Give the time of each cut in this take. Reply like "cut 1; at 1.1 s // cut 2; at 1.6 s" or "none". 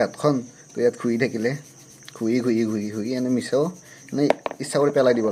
none